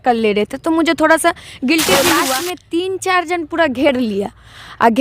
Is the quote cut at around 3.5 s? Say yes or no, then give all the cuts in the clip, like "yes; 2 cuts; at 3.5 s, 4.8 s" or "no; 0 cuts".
no; 1 cut; at 2.2 s